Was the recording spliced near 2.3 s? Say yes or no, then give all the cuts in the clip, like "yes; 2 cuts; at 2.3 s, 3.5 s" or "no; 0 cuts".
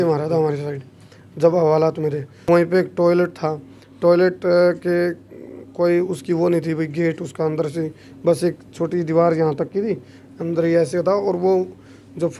yes; 1 cut; at 2.3 s